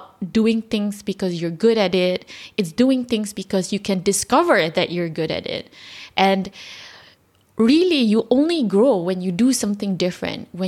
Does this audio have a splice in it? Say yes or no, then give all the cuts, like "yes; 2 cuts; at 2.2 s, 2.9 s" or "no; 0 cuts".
no; 0 cuts